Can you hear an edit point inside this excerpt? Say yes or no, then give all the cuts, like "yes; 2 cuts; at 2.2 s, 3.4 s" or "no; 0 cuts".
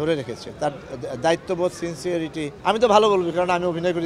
yes; 1 cut; at 2.5 s